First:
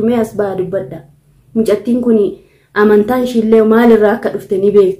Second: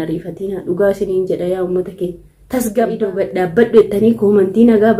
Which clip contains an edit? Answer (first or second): second